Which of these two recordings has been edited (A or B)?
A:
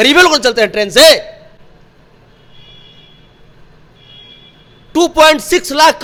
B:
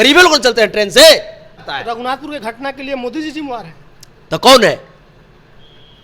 B